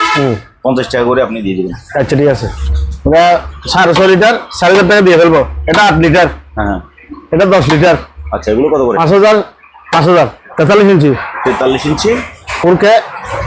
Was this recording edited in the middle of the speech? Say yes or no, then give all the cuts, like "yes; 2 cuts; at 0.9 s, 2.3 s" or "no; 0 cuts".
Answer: yes; 2 cuts; at 2.5 s, 10.4 s